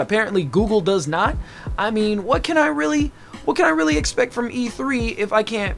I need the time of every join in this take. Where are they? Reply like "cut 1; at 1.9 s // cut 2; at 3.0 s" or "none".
none